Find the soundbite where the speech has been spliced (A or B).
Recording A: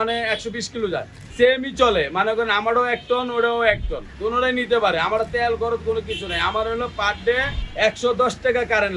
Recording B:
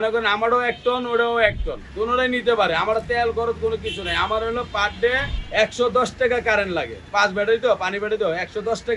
A